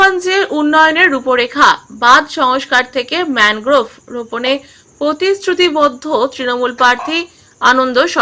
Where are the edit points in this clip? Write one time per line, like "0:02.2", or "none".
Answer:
none